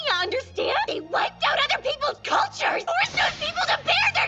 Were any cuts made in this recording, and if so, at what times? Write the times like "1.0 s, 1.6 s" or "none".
0.9 s, 2.8 s